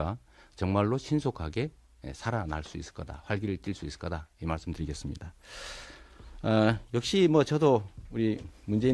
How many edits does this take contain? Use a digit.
1